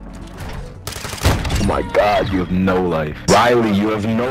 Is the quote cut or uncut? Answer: cut